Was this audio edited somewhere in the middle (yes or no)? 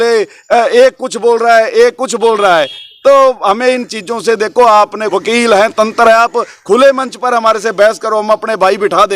yes